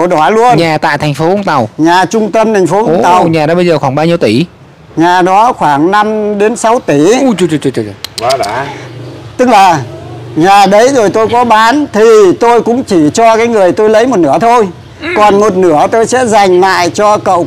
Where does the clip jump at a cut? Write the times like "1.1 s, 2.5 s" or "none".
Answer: 8.6 s